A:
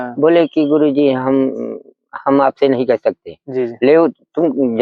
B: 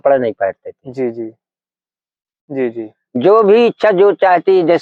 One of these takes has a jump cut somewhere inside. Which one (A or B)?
B